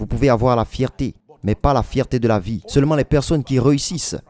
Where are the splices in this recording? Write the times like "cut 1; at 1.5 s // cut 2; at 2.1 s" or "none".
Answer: cut 1; at 2.6 s